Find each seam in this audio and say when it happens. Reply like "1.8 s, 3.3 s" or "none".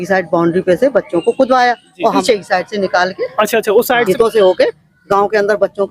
2.2 s, 4.0 s